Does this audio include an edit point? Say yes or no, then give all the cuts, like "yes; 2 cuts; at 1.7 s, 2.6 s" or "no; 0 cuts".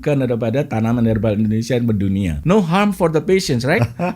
yes; 1 cut; at 2.4 s